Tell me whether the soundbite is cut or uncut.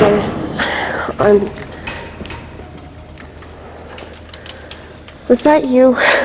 uncut